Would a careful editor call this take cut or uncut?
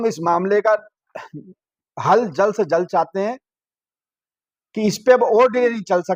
uncut